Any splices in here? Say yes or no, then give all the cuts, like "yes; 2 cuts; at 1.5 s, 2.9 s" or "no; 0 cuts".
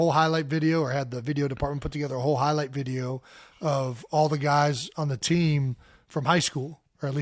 no; 0 cuts